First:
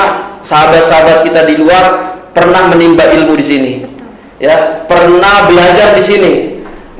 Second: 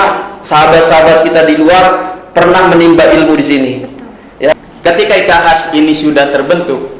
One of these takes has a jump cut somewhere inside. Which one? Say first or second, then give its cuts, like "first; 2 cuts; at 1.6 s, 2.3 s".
second; 1 cut; at 4.5 s